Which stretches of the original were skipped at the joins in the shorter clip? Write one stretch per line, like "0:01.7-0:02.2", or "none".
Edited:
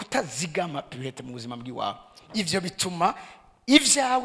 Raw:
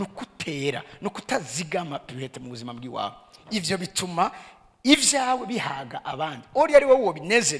none